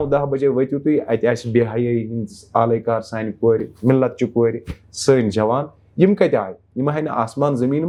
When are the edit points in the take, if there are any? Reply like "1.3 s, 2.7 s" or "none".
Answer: none